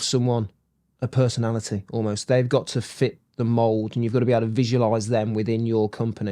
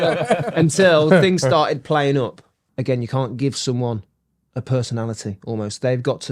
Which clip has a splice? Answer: second; 1 cut; at 2.6 s

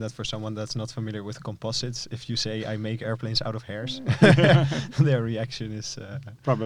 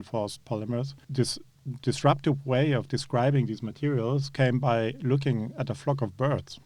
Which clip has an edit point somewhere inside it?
second; 1 cut; at 1.0 s

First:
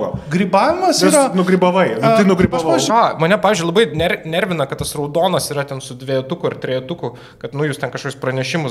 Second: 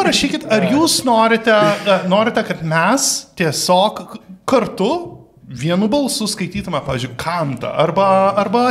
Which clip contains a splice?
first; 1 cut; at 2.9 s

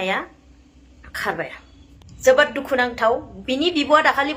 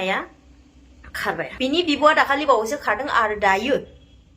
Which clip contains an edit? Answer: second; 1 cut; at 1.5 s

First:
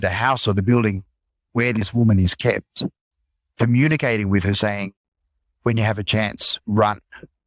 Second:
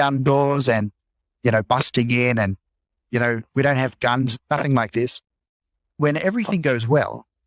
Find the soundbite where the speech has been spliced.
second; 3 cuts; at 1.2 s, 3.5 s, 6.0 s

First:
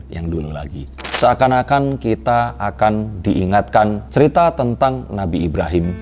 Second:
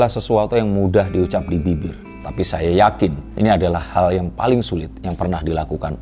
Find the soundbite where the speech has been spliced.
first; 1 cut; at 1.1 s

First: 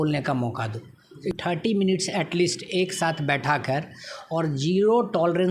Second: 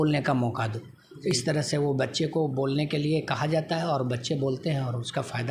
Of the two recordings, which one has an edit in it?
first; 1 cut; at 1.4 s

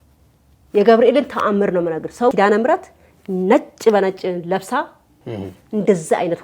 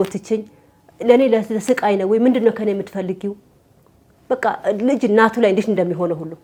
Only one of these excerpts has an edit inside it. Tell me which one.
first; 1 cut; at 2.3 s

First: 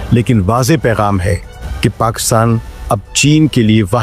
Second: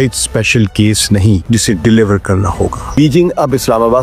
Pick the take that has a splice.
second; 2 cuts; at 1.4 s, 2.9 s

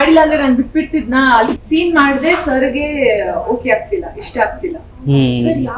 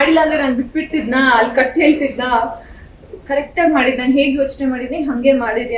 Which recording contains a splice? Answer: first; 1 cut; at 1.5 s

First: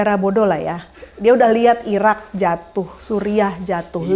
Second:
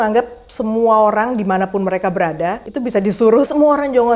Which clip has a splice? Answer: second; 2 cuts; at 2.7 s, 3.5 s

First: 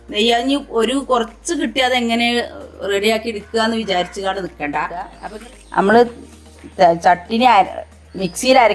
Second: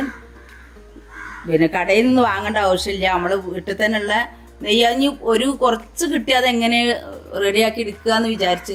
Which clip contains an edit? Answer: first; 1 cut; at 5.2 s

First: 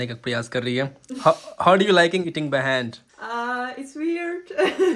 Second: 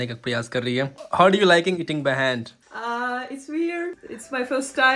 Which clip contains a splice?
second; 2 cuts; at 1.0 s, 4.0 s

